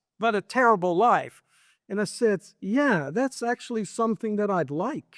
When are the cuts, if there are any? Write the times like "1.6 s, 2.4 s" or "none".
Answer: none